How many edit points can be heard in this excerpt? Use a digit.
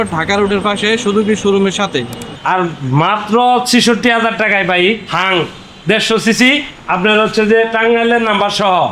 1